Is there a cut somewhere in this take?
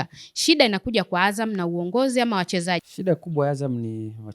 yes; 1 cut; at 2.9 s

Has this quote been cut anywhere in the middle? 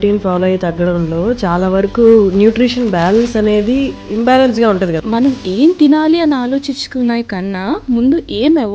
yes; 2 cuts; at 4.0 s, 5.0 s

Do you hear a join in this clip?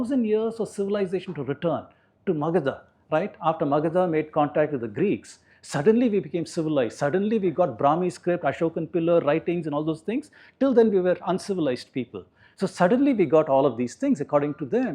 no; 0 cuts

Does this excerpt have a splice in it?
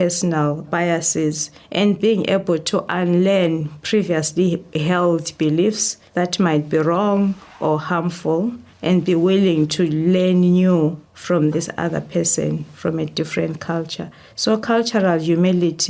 no; 0 cuts

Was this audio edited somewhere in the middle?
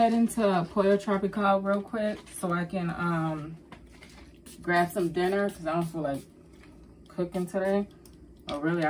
no; 0 cuts

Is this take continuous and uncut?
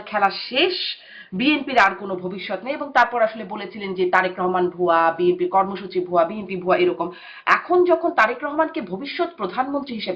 yes; 0 cuts

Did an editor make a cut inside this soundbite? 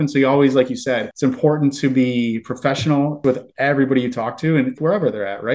yes; 3 cuts; at 1.1 s, 3.2 s, 4.8 s

